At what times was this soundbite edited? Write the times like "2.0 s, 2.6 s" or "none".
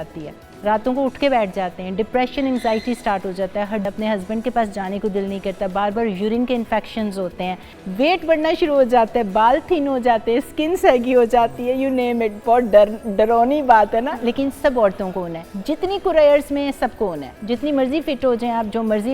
3.8 s, 7.8 s